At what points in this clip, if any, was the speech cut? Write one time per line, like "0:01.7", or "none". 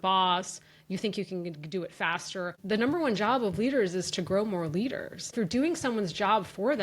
0:02.6
0:05.3